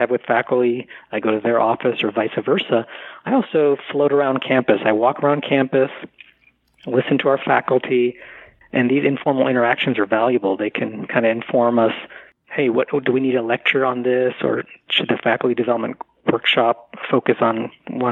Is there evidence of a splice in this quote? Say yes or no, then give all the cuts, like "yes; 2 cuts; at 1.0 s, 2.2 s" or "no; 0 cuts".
no; 0 cuts